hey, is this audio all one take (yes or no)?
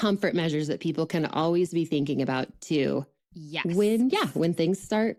yes